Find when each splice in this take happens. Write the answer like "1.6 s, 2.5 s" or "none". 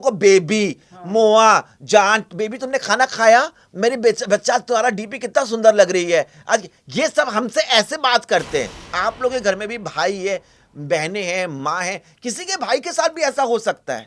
8.8 s

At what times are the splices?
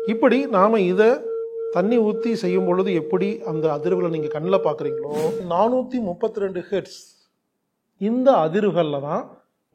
5.4 s

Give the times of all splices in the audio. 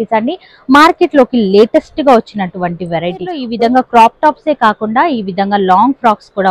3.5 s

